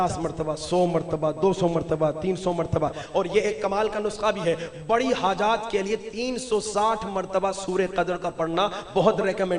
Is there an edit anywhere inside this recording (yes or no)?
no